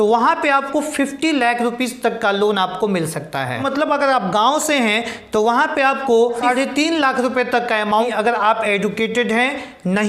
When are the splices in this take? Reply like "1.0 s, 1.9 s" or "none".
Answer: 3.6 s, 6.4 s, 8.1 s